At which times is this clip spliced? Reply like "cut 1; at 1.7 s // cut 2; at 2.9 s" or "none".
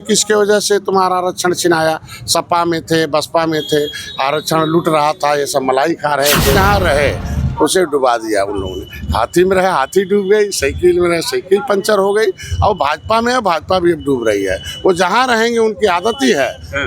cut 1; at 6.5 s